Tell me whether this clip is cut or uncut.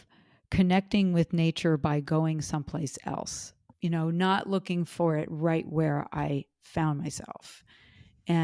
cut